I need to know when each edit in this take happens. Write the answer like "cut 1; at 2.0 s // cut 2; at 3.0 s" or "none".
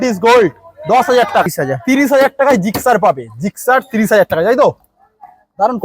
cut 1; at 1.5 s

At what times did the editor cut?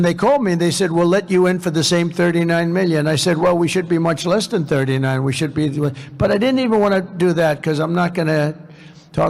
none

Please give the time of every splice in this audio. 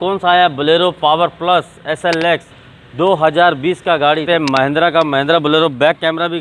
cut 1; at 2.5 s // cut 2; at 4.2 s

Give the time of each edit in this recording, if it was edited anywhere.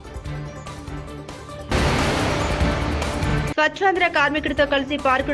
none

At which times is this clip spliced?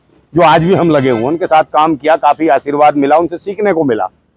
none

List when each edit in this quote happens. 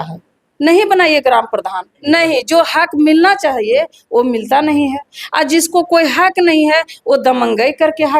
cut 1; at 1.9 s

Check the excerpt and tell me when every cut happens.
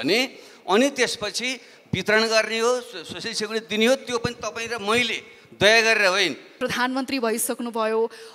cut 1; at 6.4 s

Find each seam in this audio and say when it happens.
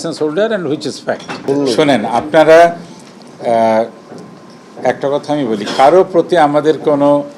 cut 1; at 1.3 s

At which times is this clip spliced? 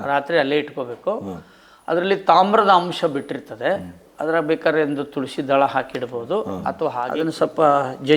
cut 1; at 7.1 s

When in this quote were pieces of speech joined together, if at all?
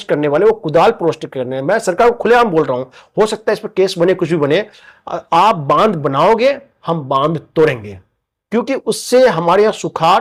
none

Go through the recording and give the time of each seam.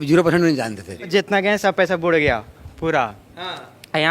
cut 1; at 1.1 s

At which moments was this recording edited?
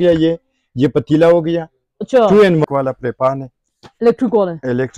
cut 1; at 2.6 s

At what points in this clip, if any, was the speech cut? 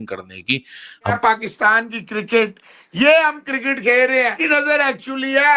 cut 1; at 1.2 s // cut 2; at 4.4 s

